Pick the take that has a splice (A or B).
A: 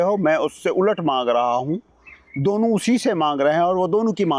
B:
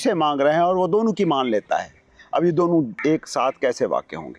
B